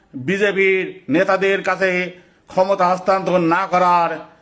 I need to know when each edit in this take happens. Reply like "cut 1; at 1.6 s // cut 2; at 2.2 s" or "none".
none